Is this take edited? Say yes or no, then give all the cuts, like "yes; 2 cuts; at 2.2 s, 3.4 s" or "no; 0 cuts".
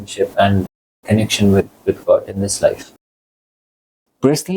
yes; 1 cut; at 3.5 s